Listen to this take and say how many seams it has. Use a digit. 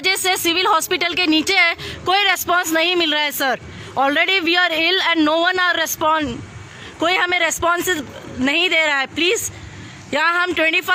0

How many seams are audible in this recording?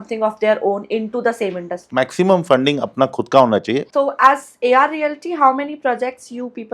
2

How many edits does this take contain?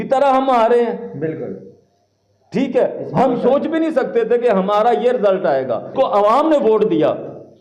1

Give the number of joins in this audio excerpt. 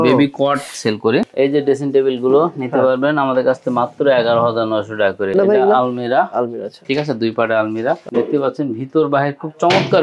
2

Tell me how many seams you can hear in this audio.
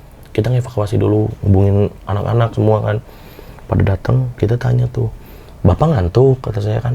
0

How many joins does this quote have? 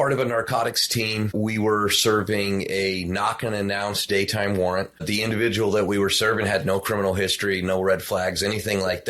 2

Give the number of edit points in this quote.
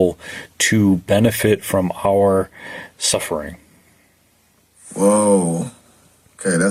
0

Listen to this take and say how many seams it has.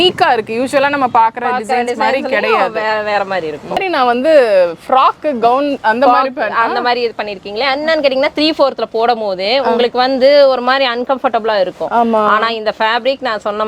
1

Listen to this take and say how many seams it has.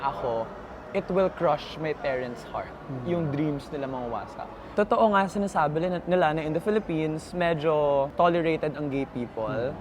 2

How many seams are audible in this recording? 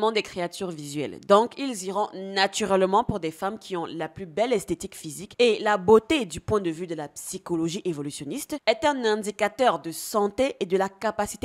0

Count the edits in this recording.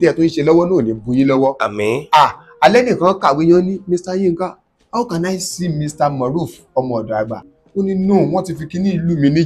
1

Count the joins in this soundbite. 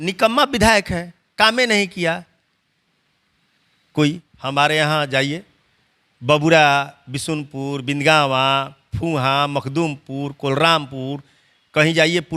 1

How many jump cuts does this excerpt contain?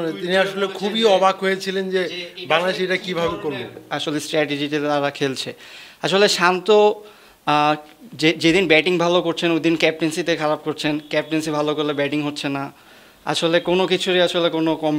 0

